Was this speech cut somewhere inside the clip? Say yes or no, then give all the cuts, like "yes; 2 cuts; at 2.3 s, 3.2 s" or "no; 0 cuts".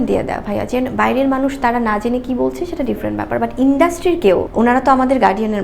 yes; 1 cut; at 4.5 s